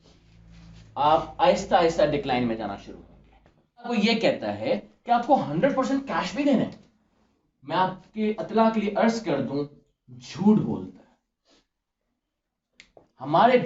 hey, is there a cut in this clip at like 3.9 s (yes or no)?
yes